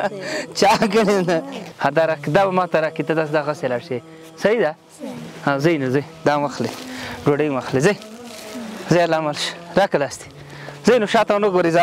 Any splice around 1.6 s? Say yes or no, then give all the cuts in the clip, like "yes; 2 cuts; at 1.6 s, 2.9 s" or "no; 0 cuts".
yes; 1 cut; at 1.6 s